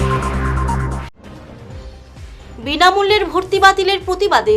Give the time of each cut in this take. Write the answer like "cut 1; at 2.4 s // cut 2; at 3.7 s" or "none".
cut 1; at 0.9 s // cut 2; at 2.0 s